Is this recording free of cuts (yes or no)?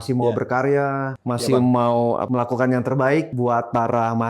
no